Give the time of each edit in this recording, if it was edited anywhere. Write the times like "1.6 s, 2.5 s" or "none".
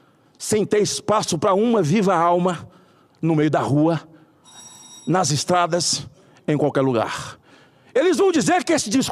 none